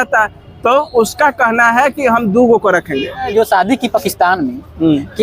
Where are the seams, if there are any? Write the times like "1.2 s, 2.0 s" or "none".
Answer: 3.3 s